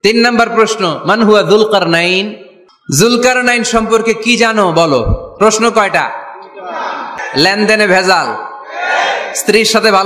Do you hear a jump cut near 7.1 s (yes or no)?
yes